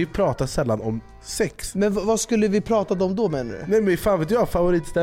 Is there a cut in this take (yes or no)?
yes